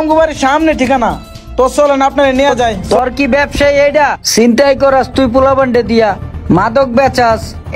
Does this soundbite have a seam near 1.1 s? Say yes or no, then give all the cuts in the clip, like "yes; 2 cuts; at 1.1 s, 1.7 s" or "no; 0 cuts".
no; 1 cut; at 2.8 s